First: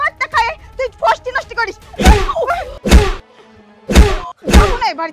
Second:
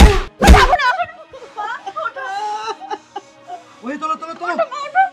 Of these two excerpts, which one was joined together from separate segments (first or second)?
first